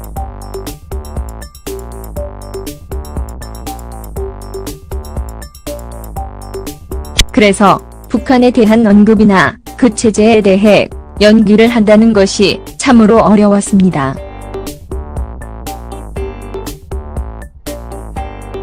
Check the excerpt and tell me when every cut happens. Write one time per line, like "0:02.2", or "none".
none

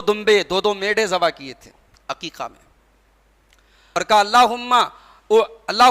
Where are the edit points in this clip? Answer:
0:03.8

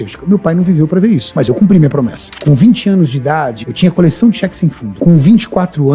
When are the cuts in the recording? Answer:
0:01.3
0:02.3
0:03.6
0:04.9

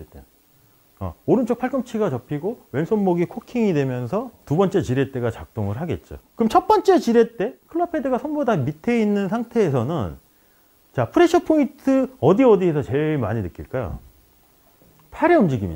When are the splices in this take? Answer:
none

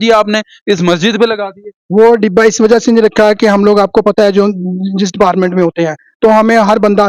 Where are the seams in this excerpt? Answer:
none

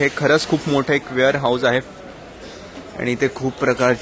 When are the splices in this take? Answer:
none

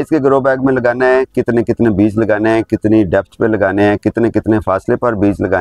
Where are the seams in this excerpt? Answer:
none

